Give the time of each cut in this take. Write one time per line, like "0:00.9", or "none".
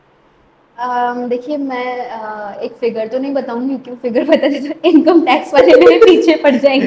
none